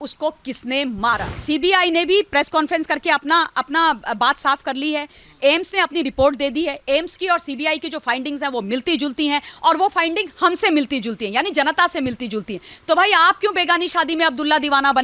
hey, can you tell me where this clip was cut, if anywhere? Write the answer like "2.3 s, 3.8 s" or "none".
1.3 s